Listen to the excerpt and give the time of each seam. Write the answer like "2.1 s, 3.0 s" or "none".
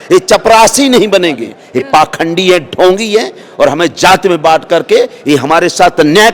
1.6 s